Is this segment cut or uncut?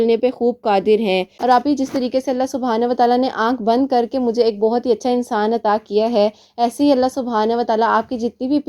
cut